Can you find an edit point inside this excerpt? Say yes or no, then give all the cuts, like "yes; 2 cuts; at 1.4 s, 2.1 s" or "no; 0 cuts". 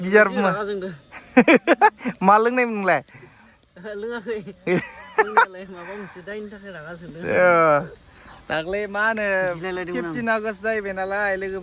no; 0 cuts